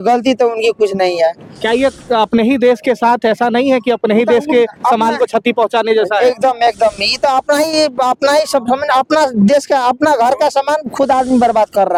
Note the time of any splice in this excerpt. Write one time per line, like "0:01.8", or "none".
none